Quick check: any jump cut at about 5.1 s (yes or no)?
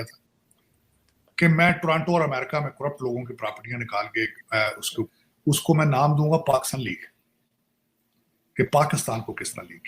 yes